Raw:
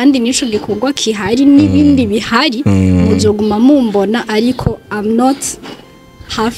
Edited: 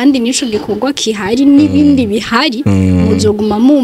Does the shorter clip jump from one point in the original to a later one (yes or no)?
no